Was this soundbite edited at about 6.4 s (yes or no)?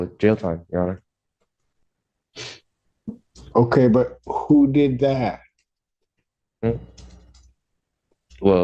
no